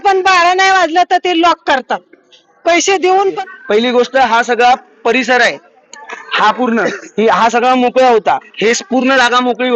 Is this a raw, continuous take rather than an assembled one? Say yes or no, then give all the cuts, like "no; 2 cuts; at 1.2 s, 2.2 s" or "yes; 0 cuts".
no; 1 cut; at 3.4 s